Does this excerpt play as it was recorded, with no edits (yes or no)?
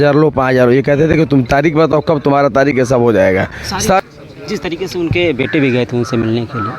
no